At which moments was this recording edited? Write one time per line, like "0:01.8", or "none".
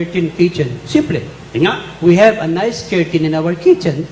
none